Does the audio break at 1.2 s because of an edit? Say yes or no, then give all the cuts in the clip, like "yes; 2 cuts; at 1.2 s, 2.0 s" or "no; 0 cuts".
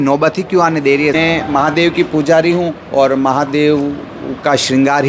yes; 1 cut; at 1.2 s